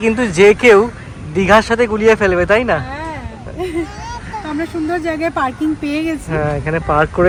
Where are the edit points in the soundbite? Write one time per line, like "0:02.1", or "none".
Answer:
none